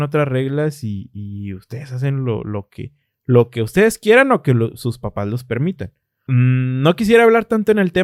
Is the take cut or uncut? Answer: uncut